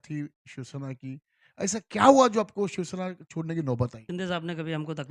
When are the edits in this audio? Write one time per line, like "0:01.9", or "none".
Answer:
0:04.0